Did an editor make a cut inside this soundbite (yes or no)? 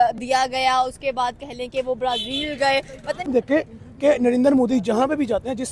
yes